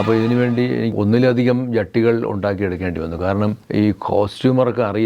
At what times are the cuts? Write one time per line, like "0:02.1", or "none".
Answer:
0:00.9
0:03.6